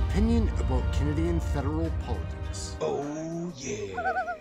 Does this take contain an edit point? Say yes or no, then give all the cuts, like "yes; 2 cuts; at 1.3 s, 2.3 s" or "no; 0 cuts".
no; 0 cuts